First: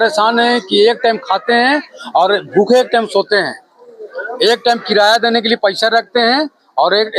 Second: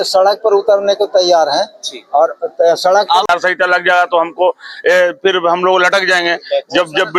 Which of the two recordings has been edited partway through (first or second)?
second